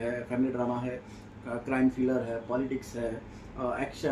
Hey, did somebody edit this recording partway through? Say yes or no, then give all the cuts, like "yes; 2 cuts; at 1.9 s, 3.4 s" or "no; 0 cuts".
no; 0 cuts